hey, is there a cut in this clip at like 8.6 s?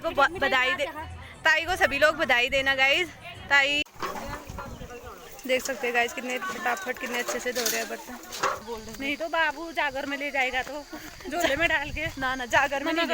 yes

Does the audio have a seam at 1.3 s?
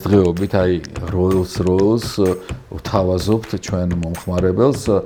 no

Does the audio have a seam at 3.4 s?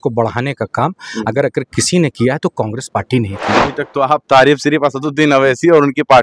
yes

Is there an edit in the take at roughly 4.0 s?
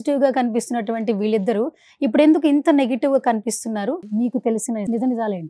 yes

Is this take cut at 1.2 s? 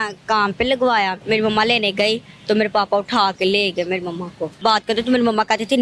yes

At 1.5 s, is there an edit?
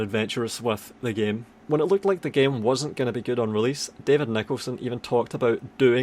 yes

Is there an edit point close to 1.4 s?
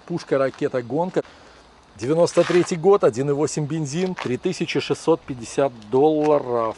yes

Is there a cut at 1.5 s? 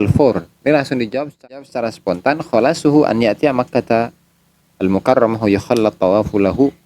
yes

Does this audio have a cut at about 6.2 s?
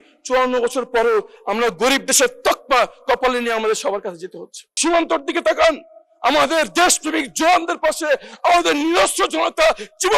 no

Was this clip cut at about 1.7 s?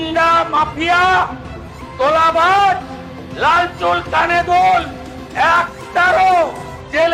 no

